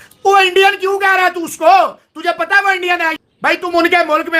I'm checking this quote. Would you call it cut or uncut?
cut